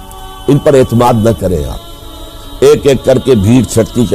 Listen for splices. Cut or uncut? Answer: cut